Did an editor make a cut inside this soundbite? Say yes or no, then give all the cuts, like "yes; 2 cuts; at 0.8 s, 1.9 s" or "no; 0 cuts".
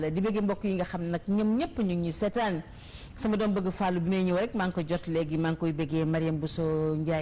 no; 0 cuts